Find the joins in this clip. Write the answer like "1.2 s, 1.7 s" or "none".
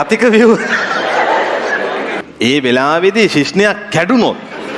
2.2 s